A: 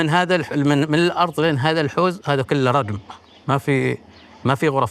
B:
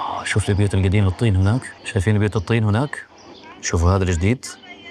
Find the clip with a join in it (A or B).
B